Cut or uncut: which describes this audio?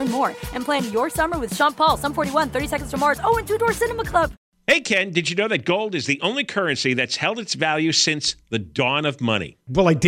cut